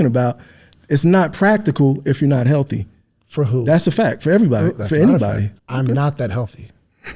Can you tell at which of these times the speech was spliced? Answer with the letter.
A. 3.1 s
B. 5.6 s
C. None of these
B